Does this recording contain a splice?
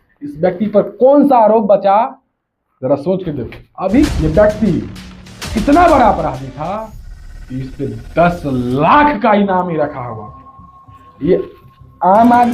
yes; 1 cut; at 4.1 s

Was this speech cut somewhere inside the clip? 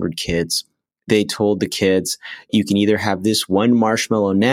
yes; 1 cut; at 2.5 s

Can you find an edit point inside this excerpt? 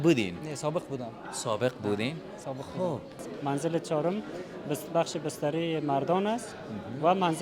yes; 1 cut; at 3.3 s

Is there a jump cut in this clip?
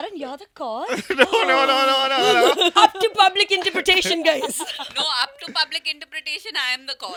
no; 0 cuts

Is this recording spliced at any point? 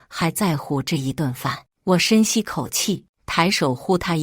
yes; 1 cut; at 3.2 s

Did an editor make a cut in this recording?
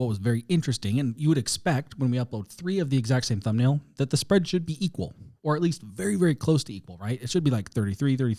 no; 0 cuts

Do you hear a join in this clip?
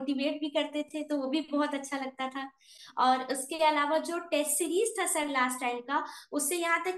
no; 0 cuts

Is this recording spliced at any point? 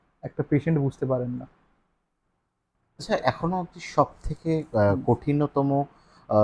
yes; 1 cut; at 2.9 s

